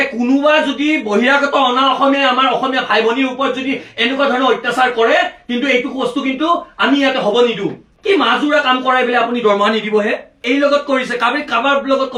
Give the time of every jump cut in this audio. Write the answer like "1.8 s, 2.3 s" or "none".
none